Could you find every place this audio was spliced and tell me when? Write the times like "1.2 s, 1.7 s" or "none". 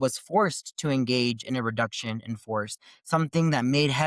none